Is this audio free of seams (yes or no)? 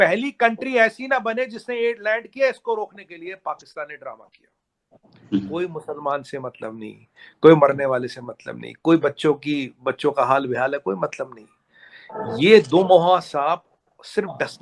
yes